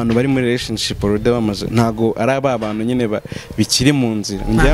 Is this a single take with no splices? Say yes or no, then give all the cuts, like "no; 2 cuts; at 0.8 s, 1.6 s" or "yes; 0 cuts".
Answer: yes; 0 cuts